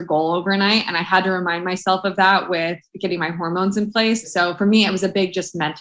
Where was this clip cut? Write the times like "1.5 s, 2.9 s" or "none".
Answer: 4.2 s